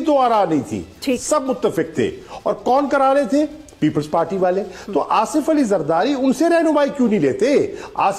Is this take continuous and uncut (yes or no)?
yes